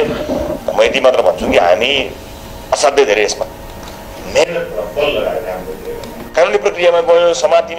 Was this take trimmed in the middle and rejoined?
yes; 1 cut; at 6.1 s

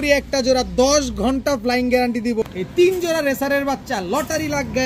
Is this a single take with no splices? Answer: no; 1 cut; at 2.5 s

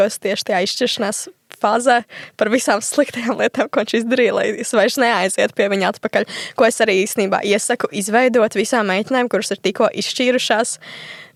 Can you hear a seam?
no; 0 cuts

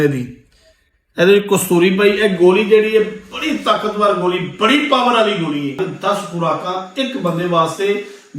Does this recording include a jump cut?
yes; 1 cut; at 5.8 s

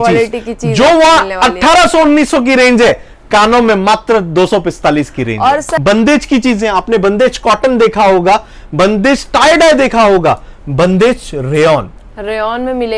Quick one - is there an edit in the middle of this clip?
yes; 1 cut; at 5.7 s

